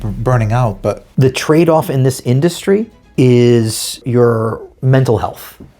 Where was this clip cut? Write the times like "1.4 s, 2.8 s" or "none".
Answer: 1.0 s, 4.7 s